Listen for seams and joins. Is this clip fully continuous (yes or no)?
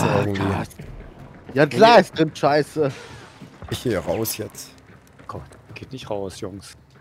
yes